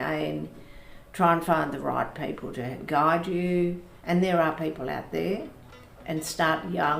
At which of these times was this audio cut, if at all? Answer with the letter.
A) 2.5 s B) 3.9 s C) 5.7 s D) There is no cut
B